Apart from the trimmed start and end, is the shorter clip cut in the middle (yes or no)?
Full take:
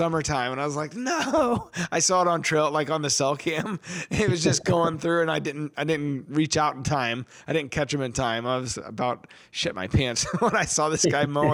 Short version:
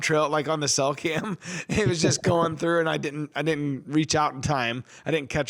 no